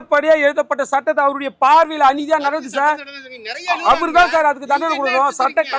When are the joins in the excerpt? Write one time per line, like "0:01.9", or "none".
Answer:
none